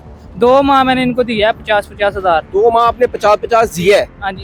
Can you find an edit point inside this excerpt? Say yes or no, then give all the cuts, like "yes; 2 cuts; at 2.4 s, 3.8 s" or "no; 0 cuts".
no; 0 cuts